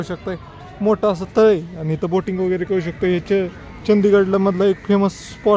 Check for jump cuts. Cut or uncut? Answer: uncut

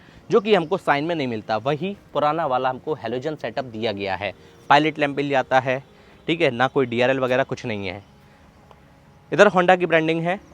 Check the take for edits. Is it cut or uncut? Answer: uncut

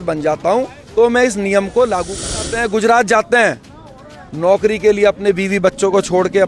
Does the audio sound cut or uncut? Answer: cut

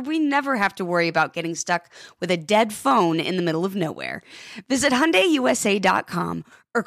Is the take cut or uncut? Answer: uncut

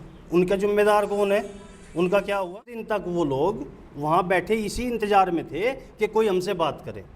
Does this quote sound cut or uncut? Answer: cut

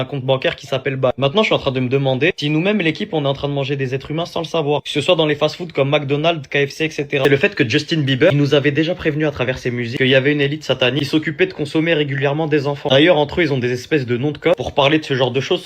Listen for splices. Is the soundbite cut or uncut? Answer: cut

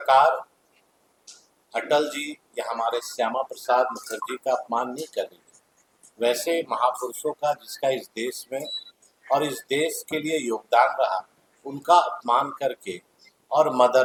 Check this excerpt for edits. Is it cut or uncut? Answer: uncut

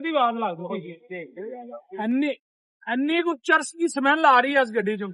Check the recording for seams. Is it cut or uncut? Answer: cut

